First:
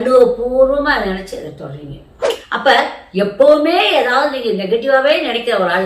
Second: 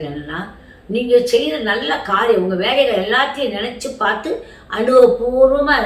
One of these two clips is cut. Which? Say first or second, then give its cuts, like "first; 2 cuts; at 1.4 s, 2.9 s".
first; 1 cut; at 2.1 s